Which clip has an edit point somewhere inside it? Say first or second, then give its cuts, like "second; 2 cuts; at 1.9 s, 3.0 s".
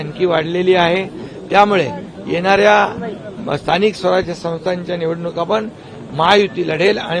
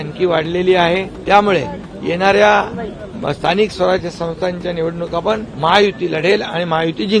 second; 2 cuts; at 1.1 s, 5.5 s